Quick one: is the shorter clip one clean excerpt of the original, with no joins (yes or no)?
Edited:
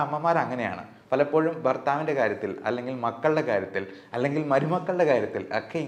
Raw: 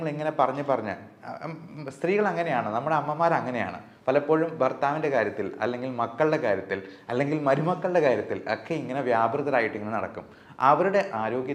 yes